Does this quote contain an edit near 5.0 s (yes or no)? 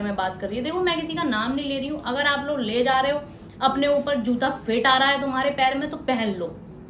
no